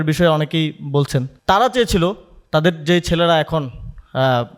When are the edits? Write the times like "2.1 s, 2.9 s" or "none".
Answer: 1.4 s